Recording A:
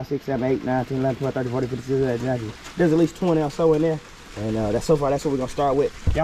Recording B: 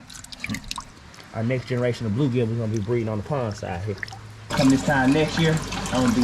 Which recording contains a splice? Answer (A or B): B